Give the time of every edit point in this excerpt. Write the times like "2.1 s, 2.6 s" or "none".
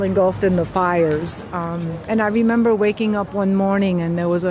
none